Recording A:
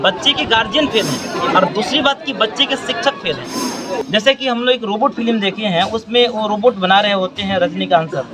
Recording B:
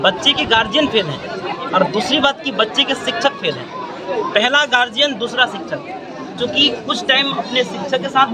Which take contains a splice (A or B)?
A